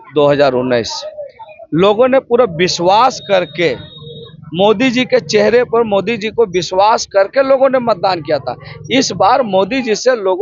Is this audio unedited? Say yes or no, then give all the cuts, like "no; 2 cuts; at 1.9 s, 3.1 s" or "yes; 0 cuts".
yes; 0 cuts